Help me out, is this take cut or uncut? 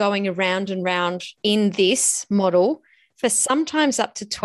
cut